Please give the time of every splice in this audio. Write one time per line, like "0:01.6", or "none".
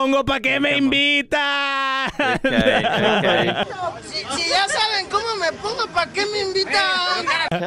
none